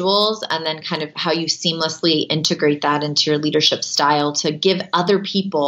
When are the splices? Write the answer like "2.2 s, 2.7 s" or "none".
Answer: none